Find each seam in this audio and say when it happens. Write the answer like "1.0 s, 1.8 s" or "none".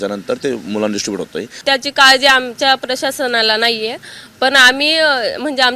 1.6 s